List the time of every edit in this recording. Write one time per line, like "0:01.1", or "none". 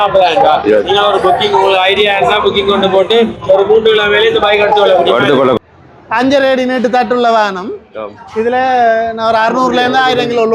0:05.6